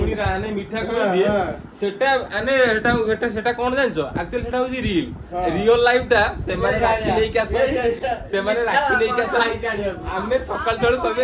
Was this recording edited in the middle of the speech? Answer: no; 0 cuts

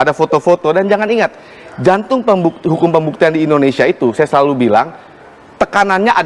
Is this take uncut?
yes; 0 cuts

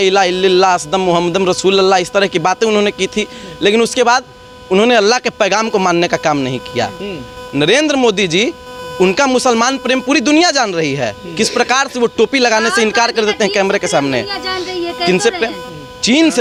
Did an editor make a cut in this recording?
no; 0 cuts

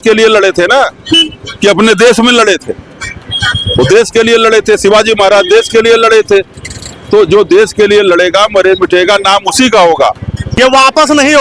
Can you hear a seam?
yes; 1 cut; at 10.4 s

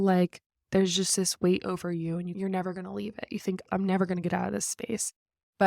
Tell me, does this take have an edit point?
yes; 2 cuts; at 2.3 s, 3.7 s

